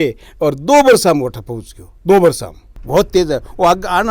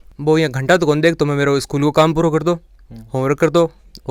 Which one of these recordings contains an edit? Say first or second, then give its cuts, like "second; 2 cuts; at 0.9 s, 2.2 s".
first; 1 cut; at 2.6 s